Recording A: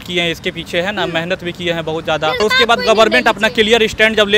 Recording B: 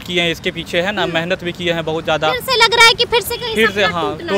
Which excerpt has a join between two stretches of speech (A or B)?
A